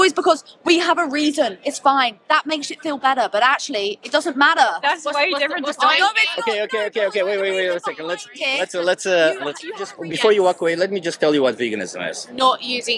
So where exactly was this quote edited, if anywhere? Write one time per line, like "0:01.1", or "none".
0:10.0